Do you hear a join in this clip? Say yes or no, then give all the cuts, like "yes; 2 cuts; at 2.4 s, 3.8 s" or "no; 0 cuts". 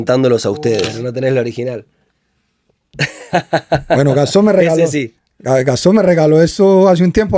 yes; 1 cut; at 0.9 s